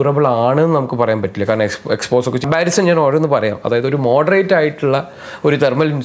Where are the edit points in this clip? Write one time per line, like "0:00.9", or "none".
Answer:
0:02.4